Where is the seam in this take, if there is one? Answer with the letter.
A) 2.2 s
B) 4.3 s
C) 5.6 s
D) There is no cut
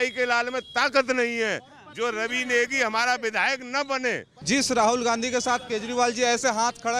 B